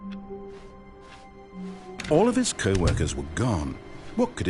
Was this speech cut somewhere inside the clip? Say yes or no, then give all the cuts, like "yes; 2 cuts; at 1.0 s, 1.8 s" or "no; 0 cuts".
yes; 1 cut; at 2.1 s